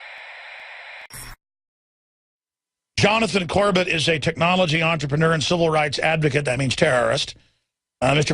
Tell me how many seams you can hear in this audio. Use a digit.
1